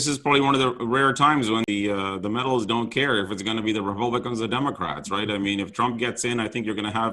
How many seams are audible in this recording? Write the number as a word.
one